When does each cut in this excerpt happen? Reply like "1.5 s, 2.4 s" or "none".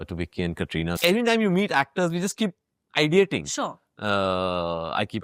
1.0 s